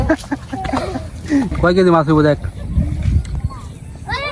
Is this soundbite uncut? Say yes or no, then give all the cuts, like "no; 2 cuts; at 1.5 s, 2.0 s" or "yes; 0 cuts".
no; 1 cut; at 1.5 s